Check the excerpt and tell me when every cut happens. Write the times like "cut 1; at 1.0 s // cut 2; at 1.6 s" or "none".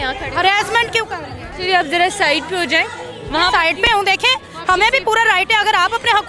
none